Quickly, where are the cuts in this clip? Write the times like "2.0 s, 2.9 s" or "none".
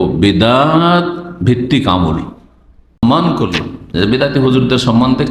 3.0 s